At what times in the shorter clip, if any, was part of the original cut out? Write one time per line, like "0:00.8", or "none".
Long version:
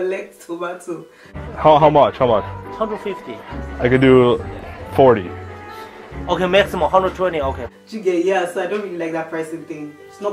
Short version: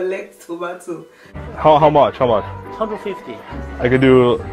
none